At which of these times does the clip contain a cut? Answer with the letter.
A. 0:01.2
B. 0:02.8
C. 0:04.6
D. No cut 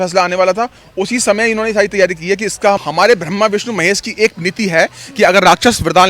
B